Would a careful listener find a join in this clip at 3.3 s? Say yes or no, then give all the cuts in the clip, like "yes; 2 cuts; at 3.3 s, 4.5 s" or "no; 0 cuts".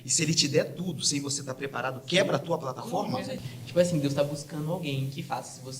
yes; 1 cut; at 3.3 s